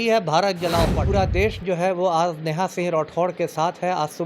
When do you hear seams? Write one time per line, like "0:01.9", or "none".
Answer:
0:01.0